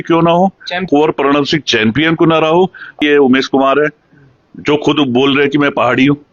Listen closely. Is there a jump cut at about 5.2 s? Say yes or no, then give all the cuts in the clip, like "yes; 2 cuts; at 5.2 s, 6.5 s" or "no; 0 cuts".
no; 2 cuts; at 0.9 s, 3.0 s